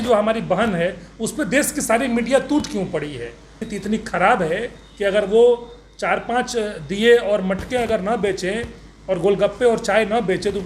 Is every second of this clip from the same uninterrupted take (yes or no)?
no